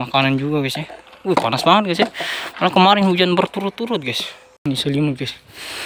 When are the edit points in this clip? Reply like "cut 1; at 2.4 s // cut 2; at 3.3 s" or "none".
cut 1; at 4.5 s